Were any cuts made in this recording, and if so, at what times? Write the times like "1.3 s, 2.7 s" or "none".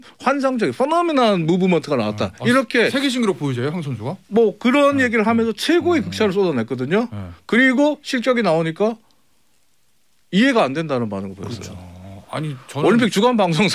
none